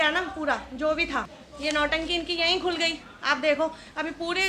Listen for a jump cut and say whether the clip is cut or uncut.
cut